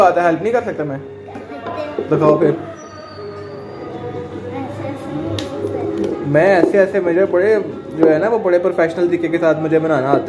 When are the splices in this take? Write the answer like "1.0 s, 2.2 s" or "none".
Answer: none